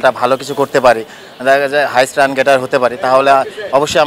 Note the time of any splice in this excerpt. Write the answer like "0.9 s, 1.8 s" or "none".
none